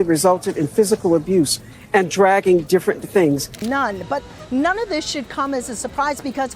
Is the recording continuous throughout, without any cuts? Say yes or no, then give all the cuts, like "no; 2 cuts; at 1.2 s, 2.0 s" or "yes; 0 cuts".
no; 1 cut; at 3.5 s